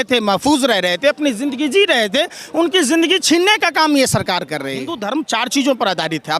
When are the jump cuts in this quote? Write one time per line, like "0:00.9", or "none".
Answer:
0:04.9